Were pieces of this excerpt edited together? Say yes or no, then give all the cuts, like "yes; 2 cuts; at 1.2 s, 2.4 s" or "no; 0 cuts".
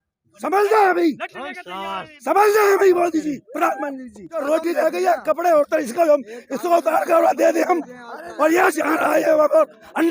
yes; 1 cut; at 4.4 s